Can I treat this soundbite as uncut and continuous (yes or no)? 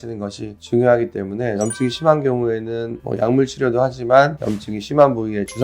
no